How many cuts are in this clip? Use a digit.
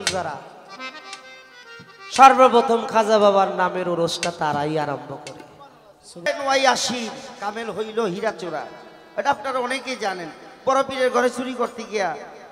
1